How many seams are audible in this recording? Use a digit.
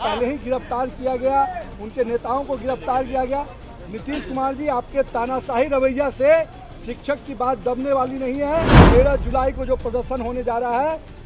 1